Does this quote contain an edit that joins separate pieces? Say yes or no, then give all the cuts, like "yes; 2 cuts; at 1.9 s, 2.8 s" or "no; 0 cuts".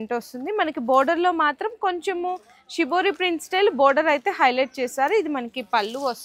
no; 0 cuts